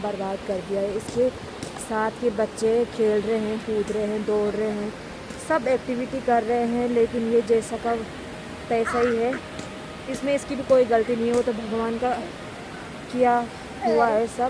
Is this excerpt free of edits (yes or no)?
yes